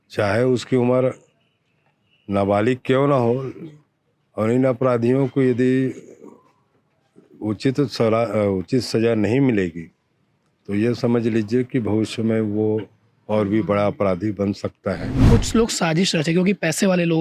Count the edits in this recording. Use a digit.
1